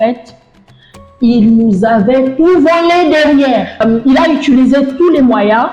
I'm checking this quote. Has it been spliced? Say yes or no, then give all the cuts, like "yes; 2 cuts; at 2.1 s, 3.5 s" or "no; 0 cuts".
yes; 1 cut; at 3.8 s